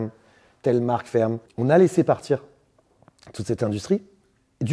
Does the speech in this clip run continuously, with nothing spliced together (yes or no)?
no